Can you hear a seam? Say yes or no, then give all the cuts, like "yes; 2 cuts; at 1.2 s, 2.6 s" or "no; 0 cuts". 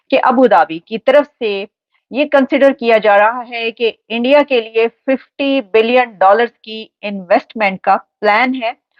no; 0 cuts